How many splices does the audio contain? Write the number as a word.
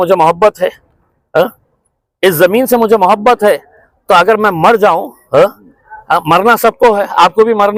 zero